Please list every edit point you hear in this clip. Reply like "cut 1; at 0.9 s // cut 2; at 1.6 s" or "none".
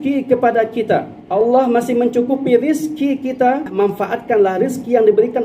cut 1; at 1.2 s // cut 2; at 3.7 s